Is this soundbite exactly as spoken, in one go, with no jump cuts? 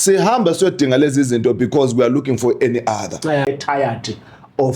no; 1 cut; at 3.4 s

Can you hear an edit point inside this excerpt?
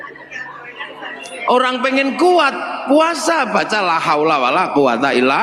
no; 0 cuts

